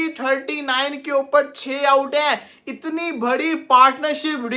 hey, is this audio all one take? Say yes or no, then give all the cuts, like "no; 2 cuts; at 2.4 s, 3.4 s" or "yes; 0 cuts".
yes; 0 cuts